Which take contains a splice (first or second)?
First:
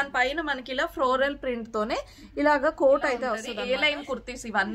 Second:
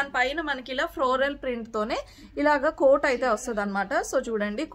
first